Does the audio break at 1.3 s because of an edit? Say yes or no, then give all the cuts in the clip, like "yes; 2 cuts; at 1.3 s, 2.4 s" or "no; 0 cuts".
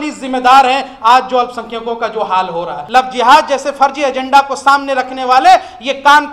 no; 1 cut; at 2.7 s